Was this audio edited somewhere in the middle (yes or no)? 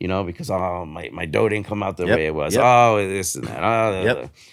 no